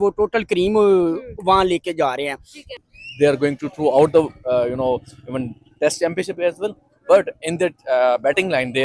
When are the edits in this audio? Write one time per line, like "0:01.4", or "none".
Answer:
0:02.8